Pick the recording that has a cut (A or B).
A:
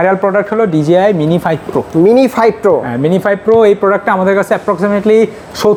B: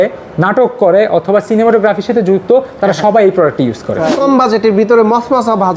B